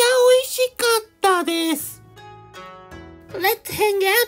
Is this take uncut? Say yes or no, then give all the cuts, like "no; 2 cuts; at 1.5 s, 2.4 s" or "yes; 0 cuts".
no; 2 cuts; at 1.9 s, 3.3 s